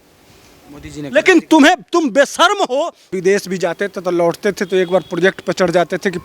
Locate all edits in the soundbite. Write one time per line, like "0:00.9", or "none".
0:03.1